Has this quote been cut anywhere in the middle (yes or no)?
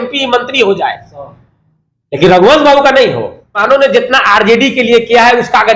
yes